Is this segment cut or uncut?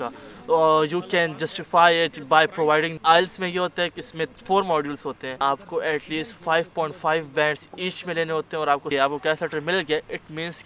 cut